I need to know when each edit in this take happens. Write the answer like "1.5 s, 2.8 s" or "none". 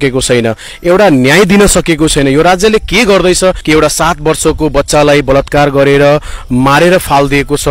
3.6 s